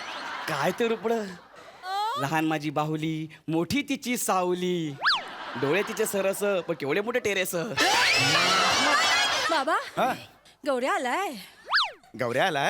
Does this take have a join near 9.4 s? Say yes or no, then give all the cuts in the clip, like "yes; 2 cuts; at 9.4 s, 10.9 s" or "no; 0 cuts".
yes; 1 cut; at 9.4 s